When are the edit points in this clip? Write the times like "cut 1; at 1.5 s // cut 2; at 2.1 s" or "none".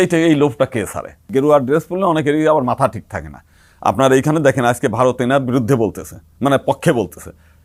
cut 1; at 1.1 s